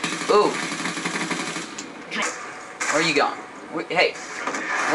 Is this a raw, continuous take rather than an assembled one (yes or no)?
no